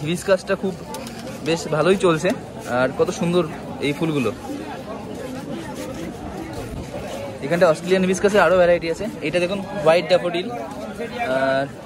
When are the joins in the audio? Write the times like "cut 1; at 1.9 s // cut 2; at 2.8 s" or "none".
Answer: none